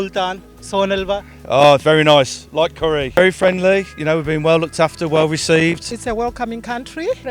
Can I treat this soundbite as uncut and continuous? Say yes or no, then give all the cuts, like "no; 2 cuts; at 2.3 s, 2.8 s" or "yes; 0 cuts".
no; 2 cuts; at 3.1 s, 5.9 s